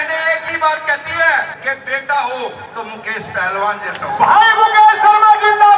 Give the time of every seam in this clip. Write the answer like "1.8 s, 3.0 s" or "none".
1.6 s, 2.6 s